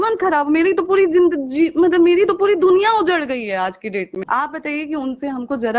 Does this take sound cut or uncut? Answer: cut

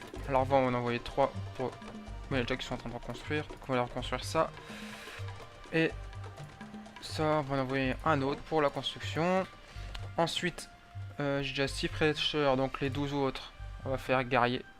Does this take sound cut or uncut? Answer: uncut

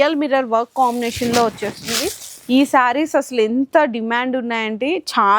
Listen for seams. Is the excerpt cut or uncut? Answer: uncut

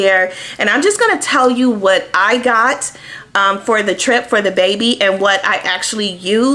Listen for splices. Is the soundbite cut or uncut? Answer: uncut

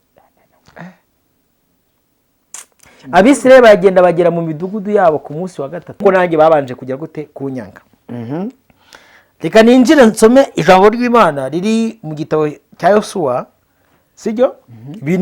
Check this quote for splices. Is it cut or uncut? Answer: cut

